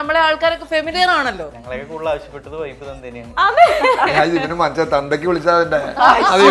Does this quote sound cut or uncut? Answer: cut